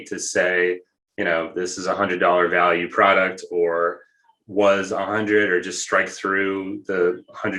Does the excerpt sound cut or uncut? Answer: uncut